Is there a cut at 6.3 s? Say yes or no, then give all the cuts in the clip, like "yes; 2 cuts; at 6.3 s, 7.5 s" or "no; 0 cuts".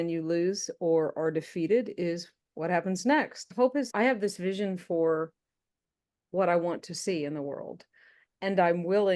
no; 1 cut; at 3.8 s